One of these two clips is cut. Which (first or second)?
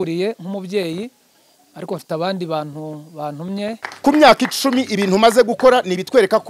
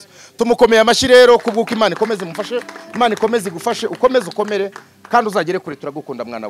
first